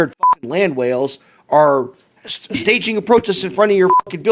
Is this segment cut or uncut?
uncut